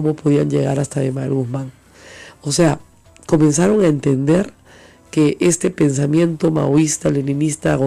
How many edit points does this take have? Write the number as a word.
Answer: zero